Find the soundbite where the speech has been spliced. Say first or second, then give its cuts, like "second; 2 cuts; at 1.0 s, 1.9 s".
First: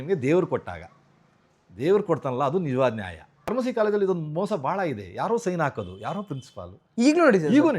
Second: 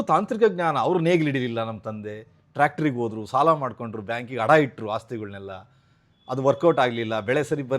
first; 1 cut; at 3.5 s